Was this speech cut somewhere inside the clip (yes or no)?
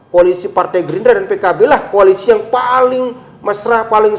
no